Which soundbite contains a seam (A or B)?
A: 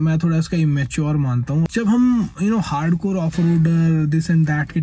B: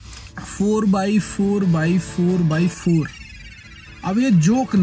A